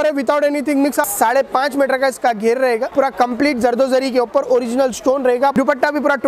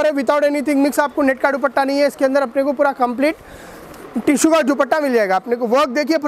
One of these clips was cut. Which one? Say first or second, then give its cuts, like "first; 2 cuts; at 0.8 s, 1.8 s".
first; 3 cuts; at 1.1 s, 2.9 s, 5.5 s